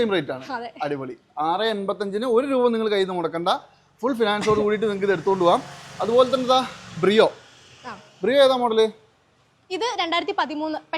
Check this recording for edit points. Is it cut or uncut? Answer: uncut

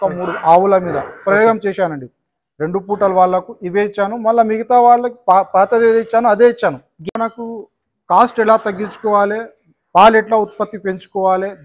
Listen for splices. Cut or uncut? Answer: cut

